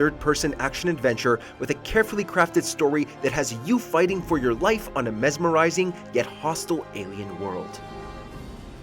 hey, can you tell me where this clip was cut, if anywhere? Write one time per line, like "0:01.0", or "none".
0:07.6